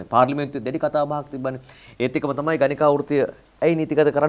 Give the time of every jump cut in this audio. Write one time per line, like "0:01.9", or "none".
none